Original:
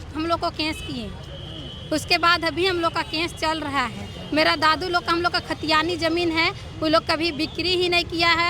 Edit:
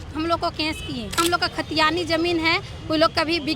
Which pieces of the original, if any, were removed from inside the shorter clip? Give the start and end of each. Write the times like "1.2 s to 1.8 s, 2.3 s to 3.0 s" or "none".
1.1 s to 5.1 s